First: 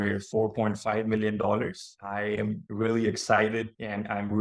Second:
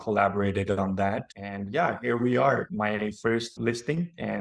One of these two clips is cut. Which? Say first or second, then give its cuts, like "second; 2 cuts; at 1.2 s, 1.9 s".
second; 1 cut; at 2.7 s